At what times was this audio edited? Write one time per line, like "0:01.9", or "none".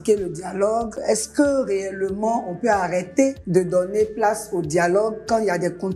0:01.0
0:03.4